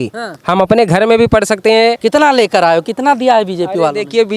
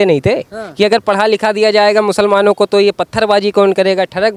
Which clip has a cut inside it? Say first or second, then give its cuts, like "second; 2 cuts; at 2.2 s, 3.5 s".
first; 1 cut; at 2.0 s